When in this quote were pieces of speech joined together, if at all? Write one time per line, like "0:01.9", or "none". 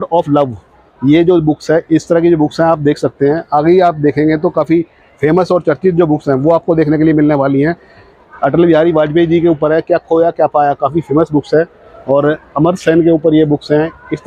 none